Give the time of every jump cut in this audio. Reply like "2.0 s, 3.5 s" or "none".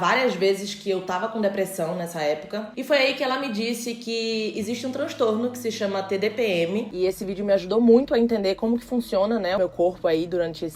2.7 s, 6.9 s, 9.6 s

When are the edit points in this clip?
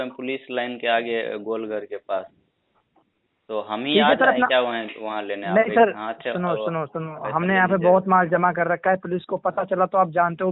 none

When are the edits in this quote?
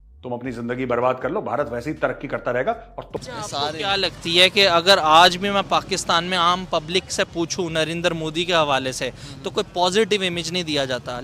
3.2 s

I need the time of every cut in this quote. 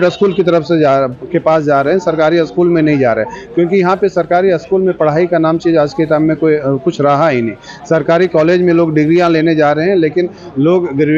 none

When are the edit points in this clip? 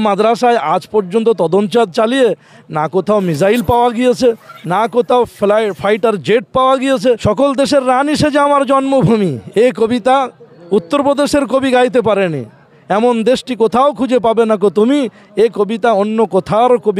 7.2 s

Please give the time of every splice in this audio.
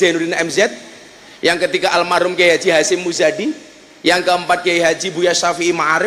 none

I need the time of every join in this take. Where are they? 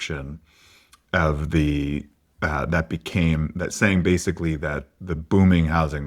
4.9 s

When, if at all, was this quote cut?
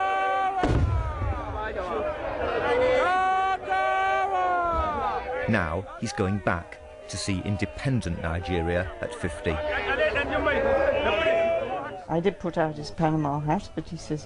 5.4 s

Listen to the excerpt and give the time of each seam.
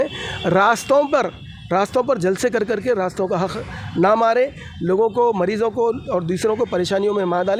none

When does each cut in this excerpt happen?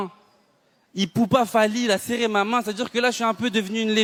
none

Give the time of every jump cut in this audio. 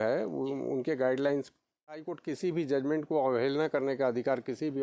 2.0 s

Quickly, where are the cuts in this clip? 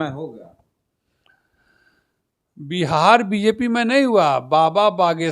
none

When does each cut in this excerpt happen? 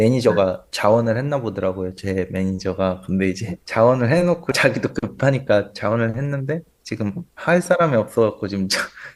none

